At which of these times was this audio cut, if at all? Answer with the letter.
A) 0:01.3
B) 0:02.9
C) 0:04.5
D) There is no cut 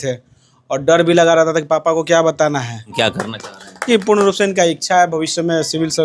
B